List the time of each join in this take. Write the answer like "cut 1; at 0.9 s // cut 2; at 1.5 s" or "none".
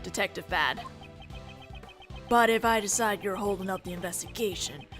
none